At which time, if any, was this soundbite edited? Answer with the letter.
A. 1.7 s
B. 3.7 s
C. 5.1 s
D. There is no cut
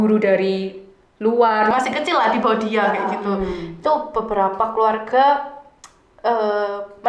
A